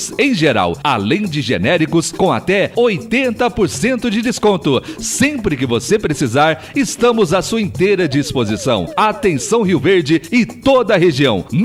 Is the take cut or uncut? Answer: uncut